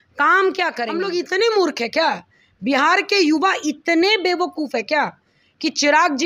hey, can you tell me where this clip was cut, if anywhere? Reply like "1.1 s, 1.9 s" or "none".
0.9 s